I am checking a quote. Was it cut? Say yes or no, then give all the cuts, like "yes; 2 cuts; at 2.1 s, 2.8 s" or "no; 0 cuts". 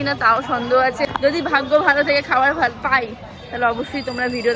yes; 1 cut; at 1.1 s